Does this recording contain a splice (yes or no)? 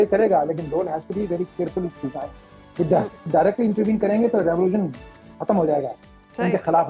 no